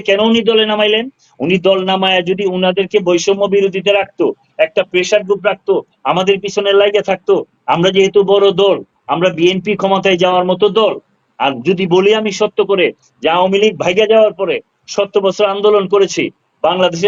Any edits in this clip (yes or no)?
no